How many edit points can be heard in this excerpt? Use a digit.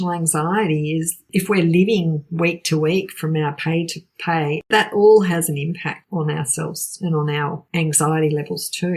4